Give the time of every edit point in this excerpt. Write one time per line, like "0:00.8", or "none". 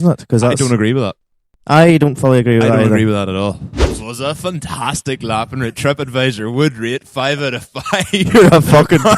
0:04.0